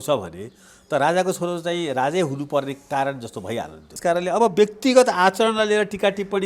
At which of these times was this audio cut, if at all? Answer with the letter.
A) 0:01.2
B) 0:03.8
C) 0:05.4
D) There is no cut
B